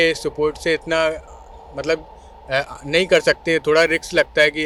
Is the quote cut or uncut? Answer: uncut